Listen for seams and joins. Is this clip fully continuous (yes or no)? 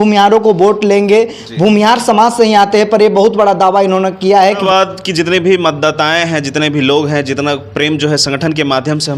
no